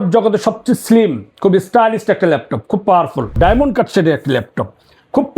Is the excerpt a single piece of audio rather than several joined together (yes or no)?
no